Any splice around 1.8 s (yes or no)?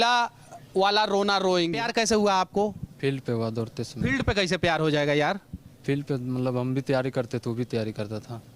yes